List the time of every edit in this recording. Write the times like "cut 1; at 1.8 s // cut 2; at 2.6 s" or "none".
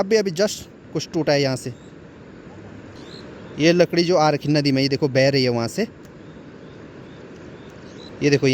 none

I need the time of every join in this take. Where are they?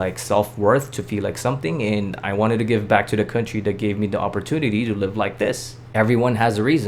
cut 1; at 5.7 s

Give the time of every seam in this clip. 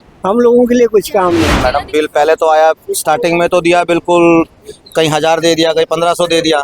cut 1; at 1.5 s

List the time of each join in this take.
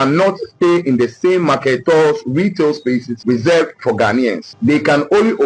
cut 1; at 1.8 s // cut 2; at 3.1 s // cut 3; at 4.5 s

